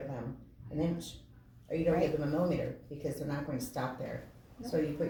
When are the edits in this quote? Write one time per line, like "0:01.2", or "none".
none